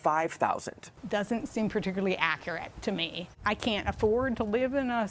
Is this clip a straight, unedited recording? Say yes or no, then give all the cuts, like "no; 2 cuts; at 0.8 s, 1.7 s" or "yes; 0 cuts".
no; 1 cut; at 3.2 s